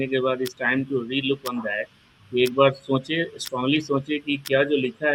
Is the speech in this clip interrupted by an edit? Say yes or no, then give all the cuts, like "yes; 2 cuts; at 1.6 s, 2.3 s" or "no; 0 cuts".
no; 0 cuts